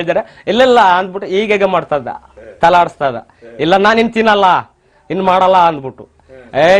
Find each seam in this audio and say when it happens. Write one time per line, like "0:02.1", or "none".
none